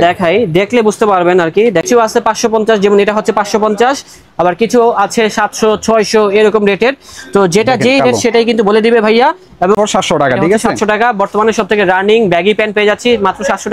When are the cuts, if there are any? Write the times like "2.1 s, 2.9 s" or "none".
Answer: 1.9 s, 9.7 s